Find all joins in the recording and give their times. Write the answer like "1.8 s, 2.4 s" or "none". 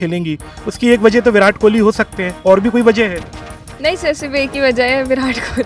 none

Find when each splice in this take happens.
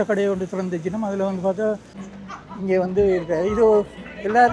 1.9 s

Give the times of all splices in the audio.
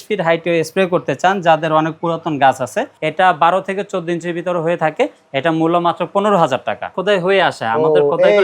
2.9 s, 7.0 s

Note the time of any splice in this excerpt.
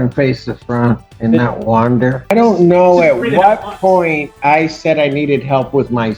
2.3 s

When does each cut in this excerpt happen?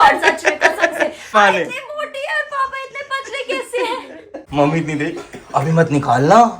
1.3 s, 4.4 s

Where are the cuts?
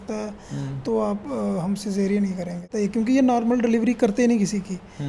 2.7 s

